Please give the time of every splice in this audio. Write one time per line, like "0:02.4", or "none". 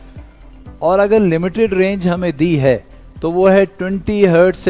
none